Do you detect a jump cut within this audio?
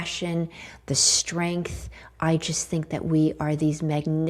no; 0 cuts

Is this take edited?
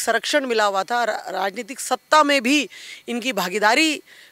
no; 0 cuts

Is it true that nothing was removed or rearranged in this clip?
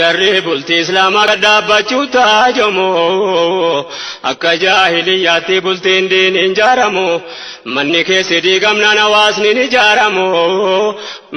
no; 1 cut; at 1.2 s

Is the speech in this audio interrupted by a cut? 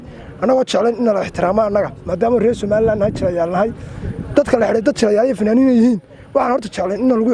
no; 0 cuts

